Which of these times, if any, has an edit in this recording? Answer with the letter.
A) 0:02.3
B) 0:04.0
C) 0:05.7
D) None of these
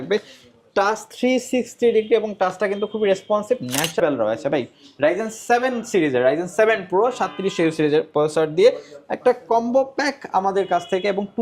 B